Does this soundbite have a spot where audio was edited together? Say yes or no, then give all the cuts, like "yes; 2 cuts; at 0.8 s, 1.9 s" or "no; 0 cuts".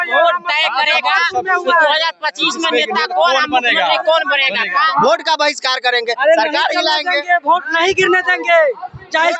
yes; 1 cut; at 4.9 s